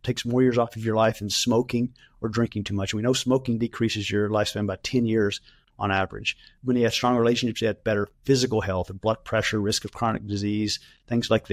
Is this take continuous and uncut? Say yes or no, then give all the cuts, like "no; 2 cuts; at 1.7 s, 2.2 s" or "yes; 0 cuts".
yes; 0 cuts